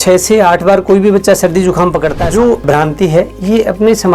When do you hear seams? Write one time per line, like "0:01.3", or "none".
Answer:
0:02.2